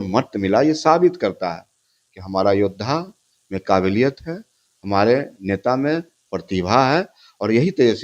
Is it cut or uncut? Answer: uncut